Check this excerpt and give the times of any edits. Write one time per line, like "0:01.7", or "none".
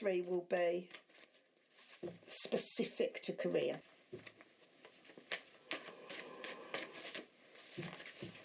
0:03.8